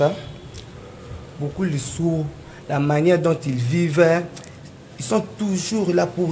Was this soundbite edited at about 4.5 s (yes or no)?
no